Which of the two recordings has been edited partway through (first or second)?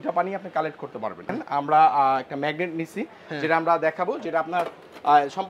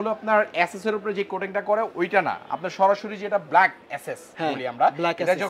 first